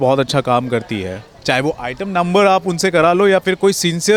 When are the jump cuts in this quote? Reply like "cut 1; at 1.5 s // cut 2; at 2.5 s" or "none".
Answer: none